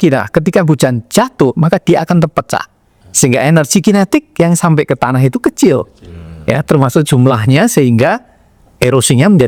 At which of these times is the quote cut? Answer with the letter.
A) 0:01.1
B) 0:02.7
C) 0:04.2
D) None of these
D